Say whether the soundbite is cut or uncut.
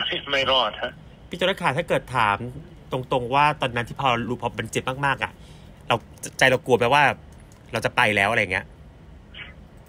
uncut